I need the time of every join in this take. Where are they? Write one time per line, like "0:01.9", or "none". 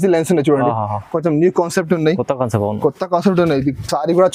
none